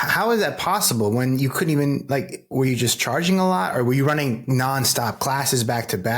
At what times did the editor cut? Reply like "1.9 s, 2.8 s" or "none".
none